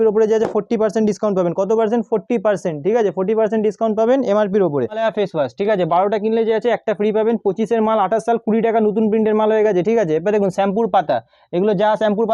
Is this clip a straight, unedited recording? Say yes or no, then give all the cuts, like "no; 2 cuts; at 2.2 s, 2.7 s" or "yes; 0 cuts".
yes; 0 cuts